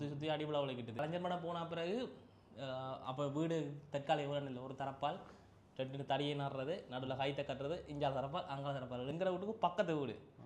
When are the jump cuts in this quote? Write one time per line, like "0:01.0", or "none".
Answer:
0:01.0
0:09.1

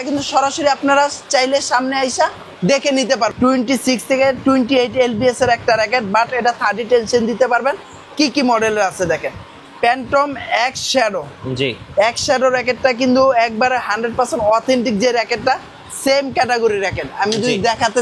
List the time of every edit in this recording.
0:03.3

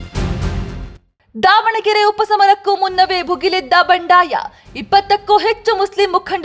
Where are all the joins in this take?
none

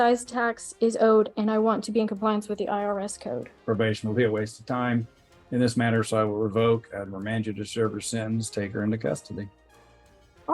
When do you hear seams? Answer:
0:03.5

